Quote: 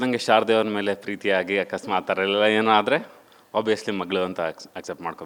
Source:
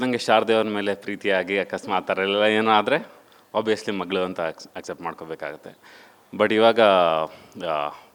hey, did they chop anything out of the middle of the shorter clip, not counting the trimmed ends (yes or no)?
no